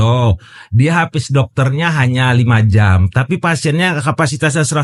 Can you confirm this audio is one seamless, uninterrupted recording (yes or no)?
yes